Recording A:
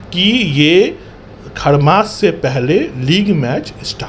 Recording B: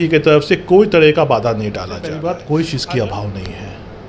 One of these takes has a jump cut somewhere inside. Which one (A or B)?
B